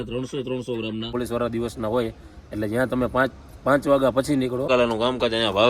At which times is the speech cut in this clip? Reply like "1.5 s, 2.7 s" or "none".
1.1 s, 4.7 s